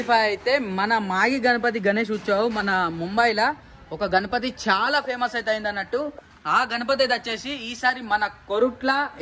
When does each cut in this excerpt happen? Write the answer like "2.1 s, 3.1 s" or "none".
none